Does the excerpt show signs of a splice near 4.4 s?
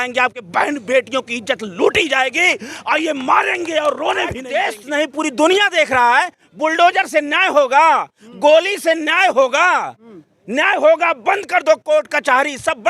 yes; 1 cut; at 4.4 s

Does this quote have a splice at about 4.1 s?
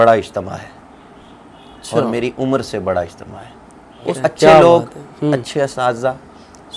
yes; 1 cut; at 4.1 s

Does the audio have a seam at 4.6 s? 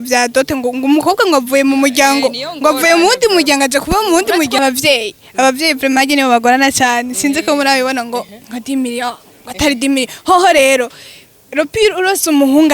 yes; 1 cut; at 4.6 s

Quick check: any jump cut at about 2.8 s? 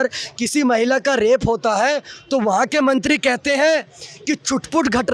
no; 0 cuts

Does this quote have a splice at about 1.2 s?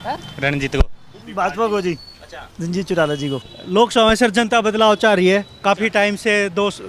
yes; 2 cuts; at 1.2 s, 3.6 s

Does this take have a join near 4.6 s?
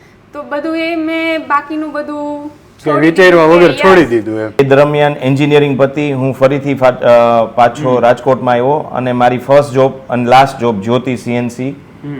yes; 1 cut; at 4.6 s

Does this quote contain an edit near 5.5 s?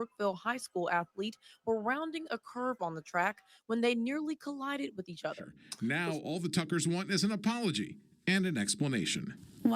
yes; 1 cut; at 5.5 s

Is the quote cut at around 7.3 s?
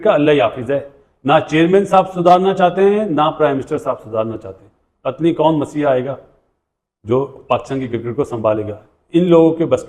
no; 0 cuts

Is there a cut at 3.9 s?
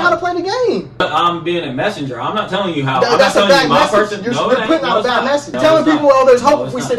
no; 2 cuts; at 1.0 s, 5.5 s

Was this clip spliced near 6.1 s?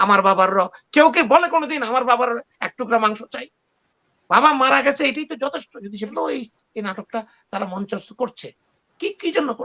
yes; 1 cut; at 6.1 s

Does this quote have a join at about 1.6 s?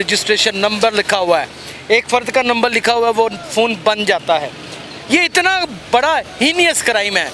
no; 0 cuts

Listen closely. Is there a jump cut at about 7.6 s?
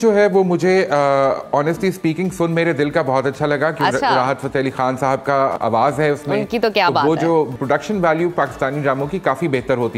yes; 2 cuts; at 5.5 s, 7.6 s

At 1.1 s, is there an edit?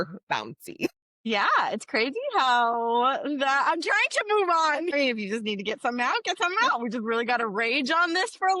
yes; 2 cuts; at 1.1 s, 4.9 s

